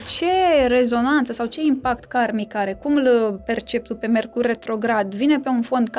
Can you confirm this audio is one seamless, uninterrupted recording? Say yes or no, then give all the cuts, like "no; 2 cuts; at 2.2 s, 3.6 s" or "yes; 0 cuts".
yes; 0 cuts